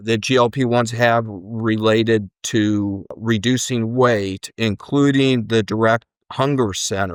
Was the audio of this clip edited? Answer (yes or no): no